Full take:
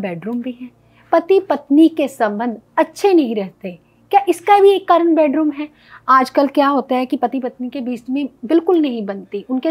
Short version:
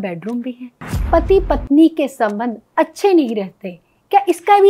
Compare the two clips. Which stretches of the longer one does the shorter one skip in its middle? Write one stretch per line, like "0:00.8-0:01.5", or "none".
none

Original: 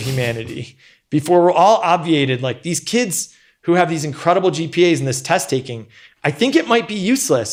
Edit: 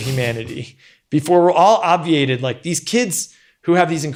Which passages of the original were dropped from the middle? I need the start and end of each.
none

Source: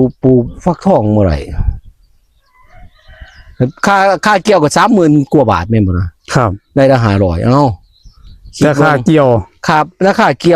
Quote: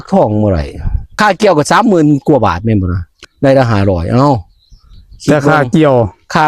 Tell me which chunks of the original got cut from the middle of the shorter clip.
0:01.9-0:04.2
0:06.3-0:06.5

